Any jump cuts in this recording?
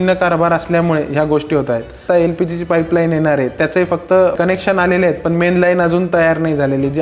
yes; 2 cuts; at 2.0 s, 4.4 s

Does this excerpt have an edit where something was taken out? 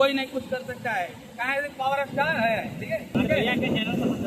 yes; 1 cut; at 3.1 s

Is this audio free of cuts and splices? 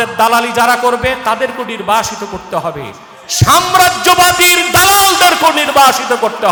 yes; 0 cuts

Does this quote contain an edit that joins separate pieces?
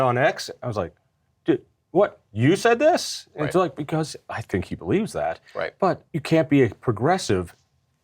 yes; 1 cut; at 6.1 s

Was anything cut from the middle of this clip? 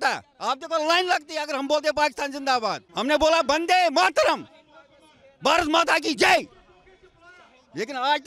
yes; 1 cut; at 2.8 s

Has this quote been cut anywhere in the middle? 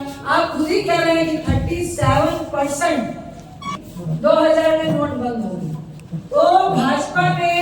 yes; 1 cut; at 3.7 s

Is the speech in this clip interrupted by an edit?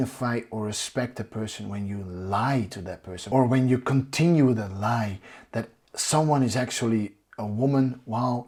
no; 0 cuts

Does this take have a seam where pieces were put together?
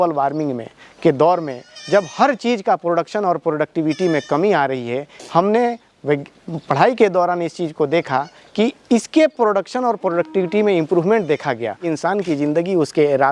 yes; 1 cut; at 11.8 s

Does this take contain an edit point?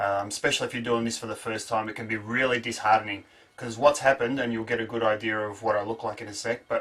yes; 1 cut; at 3.9 s

